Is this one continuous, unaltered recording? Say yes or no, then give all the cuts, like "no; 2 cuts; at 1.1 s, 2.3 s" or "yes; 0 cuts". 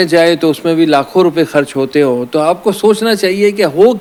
yes; 0 cuts